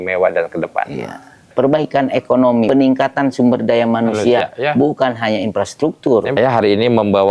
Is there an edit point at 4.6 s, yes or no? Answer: no